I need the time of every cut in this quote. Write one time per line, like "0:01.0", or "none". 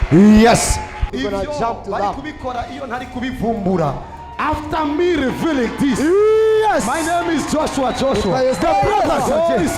0:01.1